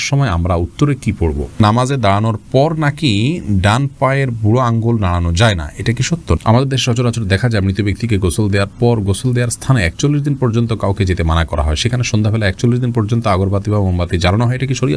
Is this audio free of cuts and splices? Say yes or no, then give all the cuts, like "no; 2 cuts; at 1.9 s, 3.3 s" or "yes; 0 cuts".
no; 2 cuts; at 1.6 s, 6.4 s